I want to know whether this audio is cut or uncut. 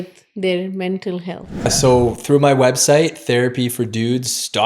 cut